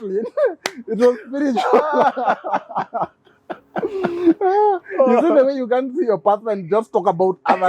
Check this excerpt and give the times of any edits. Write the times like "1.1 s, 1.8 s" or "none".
none